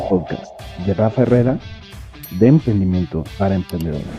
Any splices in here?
yes; 1 cut; at 3.3 s

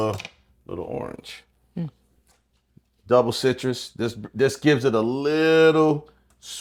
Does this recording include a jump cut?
no; 0 cuts

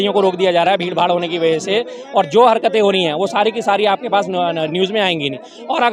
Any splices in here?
no; 0 cuts

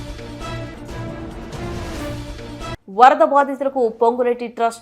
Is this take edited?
yes; 1 cut; at 2.8 s

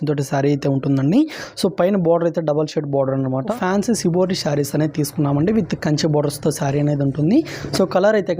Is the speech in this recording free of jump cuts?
no; 1 cut; at 3.5 s

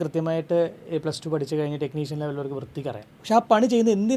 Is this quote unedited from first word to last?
no; 1 cut; at 3.1 s

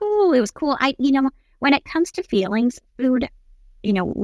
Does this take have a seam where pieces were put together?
no; 0 cuts

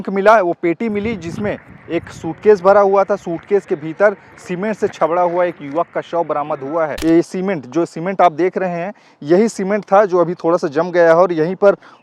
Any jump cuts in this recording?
yes; 1 cut; at 7.0 s

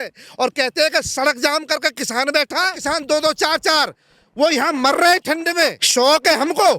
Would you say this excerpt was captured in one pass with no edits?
no; 2 cuts; at 2.8 s, 5.8 s

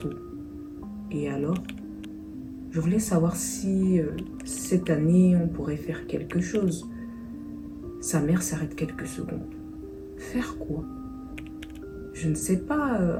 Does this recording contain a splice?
no; 0 cuts

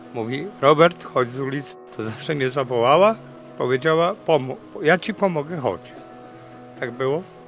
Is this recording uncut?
no; 1 cut; at 1.7 s

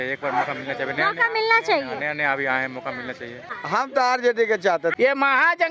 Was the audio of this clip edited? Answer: yes; 2 cuts; at 3.5 s, 4.9 s

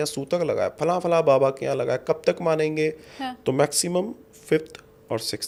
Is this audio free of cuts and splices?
yes; 0 cuts

